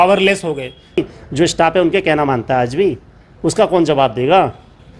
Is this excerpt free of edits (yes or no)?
no